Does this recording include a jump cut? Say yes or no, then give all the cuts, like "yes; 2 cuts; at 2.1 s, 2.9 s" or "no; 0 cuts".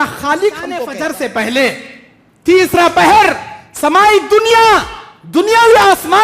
yes; 1 cut; at 0.9 s